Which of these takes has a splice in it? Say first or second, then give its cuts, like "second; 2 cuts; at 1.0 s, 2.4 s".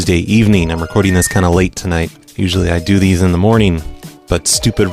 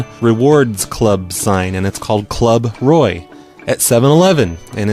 second; 1 cut; at 2.3 s